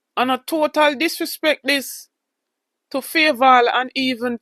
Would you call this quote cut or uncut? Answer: uncut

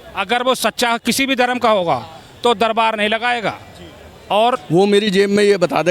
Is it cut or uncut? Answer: cut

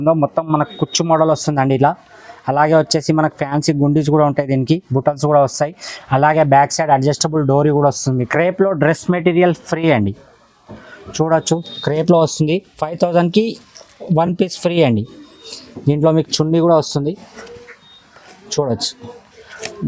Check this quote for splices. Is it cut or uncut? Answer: cut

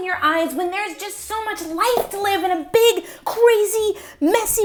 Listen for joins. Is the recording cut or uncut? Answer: uncut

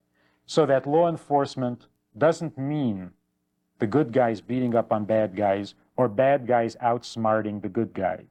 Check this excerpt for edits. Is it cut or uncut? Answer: uncut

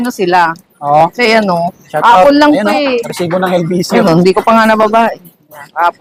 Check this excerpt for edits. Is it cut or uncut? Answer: uncut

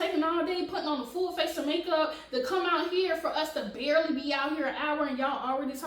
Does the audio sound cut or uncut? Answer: uncut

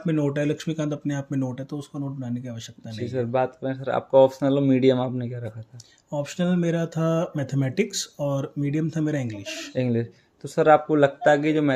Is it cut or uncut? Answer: uncut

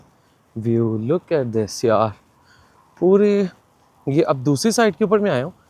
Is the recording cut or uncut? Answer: uncut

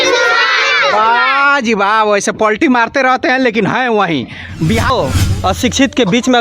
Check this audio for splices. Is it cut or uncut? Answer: cut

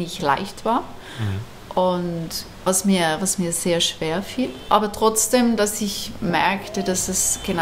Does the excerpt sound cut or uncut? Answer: cut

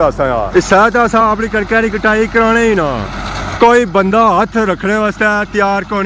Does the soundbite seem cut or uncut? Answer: cut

